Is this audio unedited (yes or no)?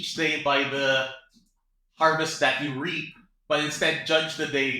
yes